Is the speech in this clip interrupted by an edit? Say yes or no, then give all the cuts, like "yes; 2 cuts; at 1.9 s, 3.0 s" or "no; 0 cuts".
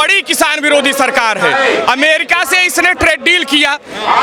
no; 0 cuts